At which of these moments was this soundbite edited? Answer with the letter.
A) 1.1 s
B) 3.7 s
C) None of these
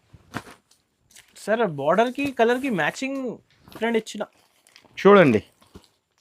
B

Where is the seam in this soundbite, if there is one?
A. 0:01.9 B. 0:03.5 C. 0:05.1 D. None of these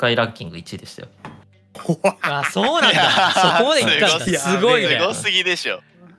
D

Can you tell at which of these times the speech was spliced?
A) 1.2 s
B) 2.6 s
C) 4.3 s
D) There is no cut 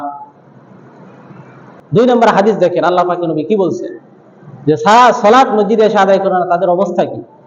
A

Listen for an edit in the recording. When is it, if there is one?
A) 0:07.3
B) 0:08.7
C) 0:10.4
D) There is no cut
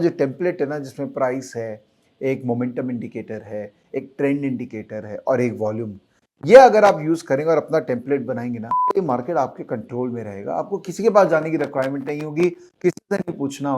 B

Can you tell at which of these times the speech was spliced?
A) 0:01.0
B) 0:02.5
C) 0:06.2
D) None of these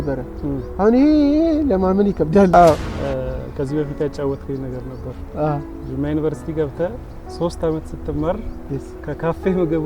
B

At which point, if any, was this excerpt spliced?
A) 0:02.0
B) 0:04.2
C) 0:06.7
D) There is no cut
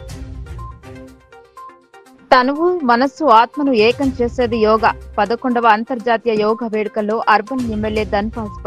A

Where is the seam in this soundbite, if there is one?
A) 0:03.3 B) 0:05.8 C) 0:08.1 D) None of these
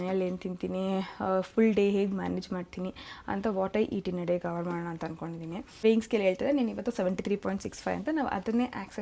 B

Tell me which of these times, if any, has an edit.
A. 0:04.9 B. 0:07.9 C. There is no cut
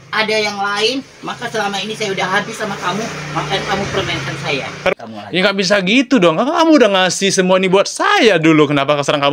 A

